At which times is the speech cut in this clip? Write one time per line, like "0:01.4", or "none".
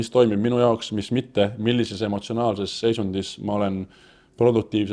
none